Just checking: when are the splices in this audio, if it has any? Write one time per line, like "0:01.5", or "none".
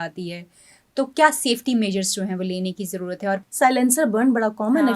0:03.4